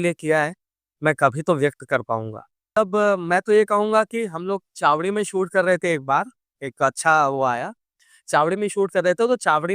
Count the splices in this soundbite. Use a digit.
1